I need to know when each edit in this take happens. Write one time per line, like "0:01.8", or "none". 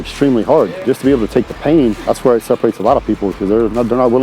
0:00.8
0:02.0